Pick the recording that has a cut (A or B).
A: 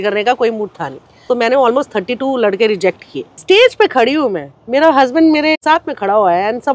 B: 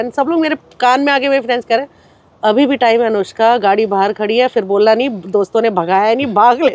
A